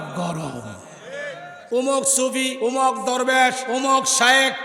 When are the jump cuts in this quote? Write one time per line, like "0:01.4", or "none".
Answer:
0:01.5
0:02.5
0:03.6